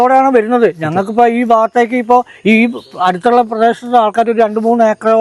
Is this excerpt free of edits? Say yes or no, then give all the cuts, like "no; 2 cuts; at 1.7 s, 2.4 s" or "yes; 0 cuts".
yes; 0 cuts